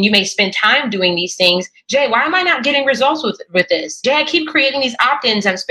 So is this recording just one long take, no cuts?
no; 1 cut; at 3.9 s

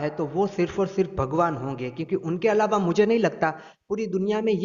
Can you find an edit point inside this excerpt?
no; 0 cuts

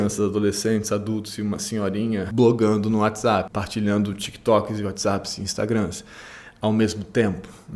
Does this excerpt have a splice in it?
yes; 2 cuts; at 2.3 s, 3.5 s

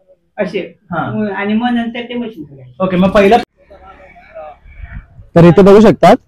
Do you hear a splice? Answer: yes; 1 cut; at 3.4 s

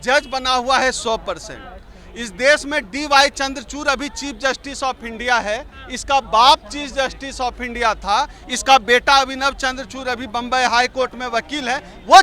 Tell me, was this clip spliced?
no; 0 cuts

